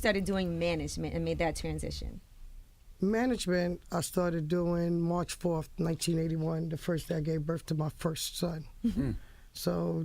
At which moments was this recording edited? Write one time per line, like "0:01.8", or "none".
0:04.4